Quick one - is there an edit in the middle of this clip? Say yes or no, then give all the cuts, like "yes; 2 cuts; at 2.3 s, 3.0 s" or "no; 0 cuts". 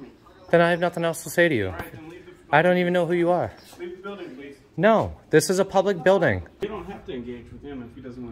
yes; 1 cut; at 6.6 s